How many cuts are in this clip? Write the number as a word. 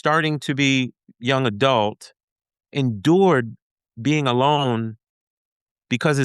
two